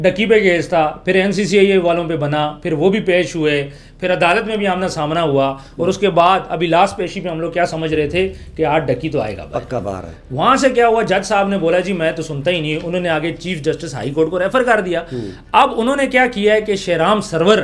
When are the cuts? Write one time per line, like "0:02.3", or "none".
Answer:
none

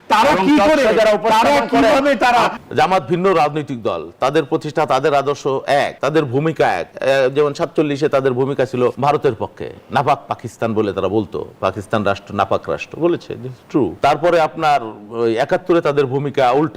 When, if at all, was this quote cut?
0:02.5
0:05.9
0:06.9
0:09.0
0:13.9

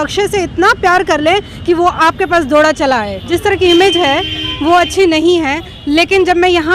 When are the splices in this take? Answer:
0:03.3

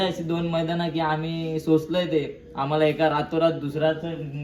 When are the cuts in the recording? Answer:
none

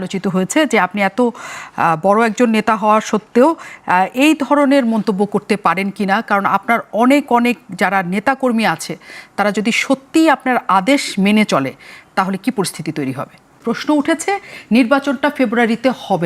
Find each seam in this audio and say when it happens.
0:13.6

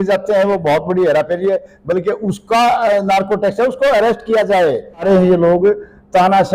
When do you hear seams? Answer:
0:05.0

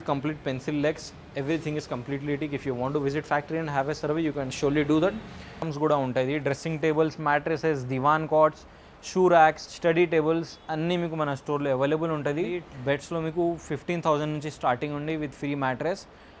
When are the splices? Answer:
0:05.7
0:12.7

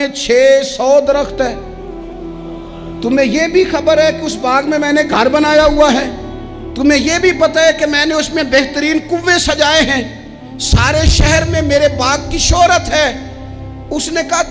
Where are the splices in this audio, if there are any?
none

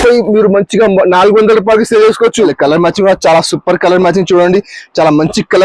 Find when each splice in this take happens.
0:02.5

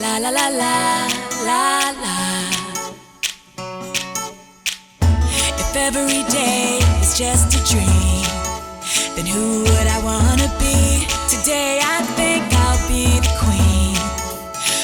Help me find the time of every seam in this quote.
none

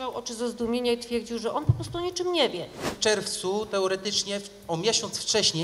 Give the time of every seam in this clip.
0:02.9

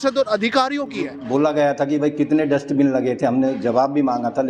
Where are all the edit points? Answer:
0:01.2

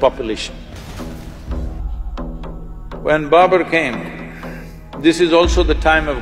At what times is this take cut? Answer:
0:01.8

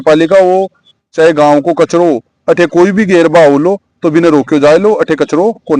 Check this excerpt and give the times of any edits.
none

